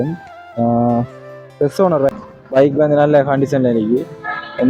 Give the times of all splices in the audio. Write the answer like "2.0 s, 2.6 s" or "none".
2.3 s